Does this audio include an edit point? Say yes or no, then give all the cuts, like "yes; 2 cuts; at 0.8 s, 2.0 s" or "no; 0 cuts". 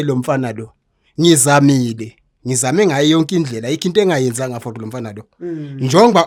no; 0 cuts